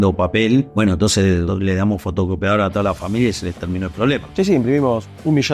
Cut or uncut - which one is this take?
cut